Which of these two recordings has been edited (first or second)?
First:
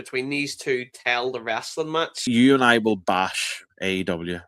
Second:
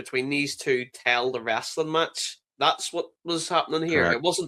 first